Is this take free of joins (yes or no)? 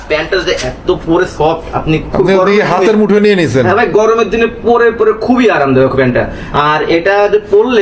yes